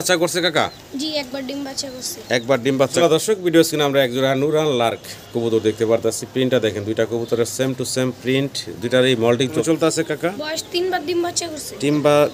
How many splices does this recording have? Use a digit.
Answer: 2